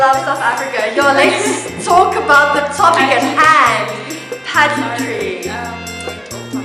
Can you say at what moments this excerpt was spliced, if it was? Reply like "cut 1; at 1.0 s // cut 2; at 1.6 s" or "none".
none